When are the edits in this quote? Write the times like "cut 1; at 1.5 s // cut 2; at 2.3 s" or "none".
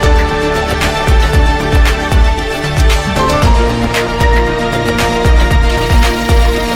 none

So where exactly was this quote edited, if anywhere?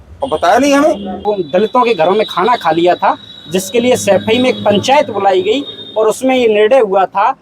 cut 1; at 1.3 s

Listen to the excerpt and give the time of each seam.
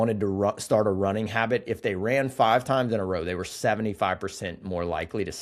none

